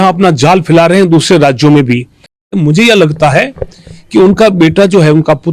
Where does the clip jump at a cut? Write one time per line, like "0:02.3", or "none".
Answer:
0:02.5